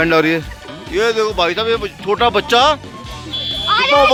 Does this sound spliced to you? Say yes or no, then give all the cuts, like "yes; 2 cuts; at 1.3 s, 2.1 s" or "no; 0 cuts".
no; 0 cuts